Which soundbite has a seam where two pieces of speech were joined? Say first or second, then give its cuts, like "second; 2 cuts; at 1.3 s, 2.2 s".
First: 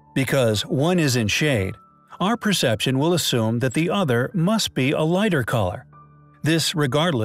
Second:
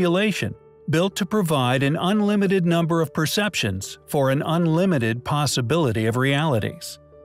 first; 1 cut; at 1.7 s